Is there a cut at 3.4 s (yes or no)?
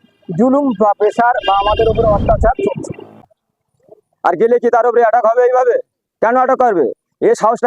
yes